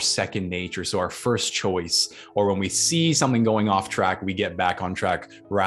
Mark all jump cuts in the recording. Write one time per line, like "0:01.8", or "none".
none

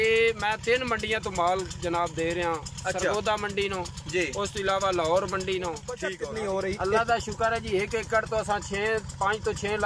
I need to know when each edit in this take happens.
0:06.1

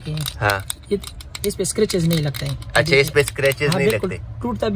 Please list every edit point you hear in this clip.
none

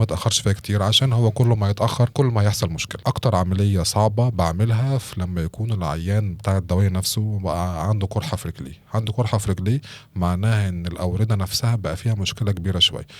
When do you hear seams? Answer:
0:02.1
0:02.9

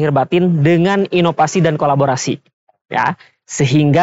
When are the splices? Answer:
none

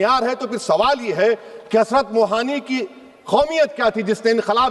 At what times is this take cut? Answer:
none

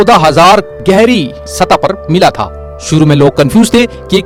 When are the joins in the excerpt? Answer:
none

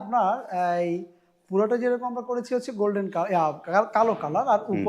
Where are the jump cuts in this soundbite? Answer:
none

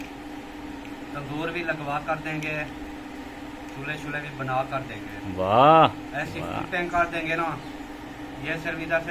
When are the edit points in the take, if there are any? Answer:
none

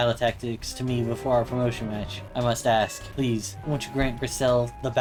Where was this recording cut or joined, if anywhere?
none

